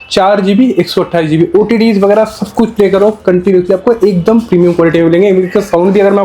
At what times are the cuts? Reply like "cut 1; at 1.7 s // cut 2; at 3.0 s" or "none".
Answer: none